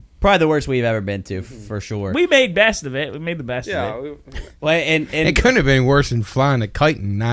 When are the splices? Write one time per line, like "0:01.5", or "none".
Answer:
none